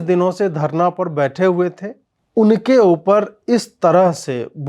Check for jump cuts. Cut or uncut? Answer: cut